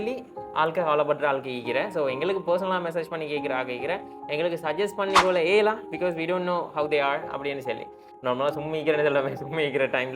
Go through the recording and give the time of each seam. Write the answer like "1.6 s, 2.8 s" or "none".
8.1 s